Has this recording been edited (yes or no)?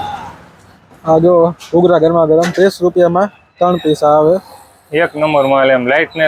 no